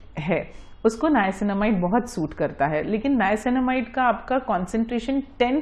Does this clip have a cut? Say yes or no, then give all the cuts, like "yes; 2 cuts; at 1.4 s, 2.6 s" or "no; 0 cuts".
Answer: no; 0 cuts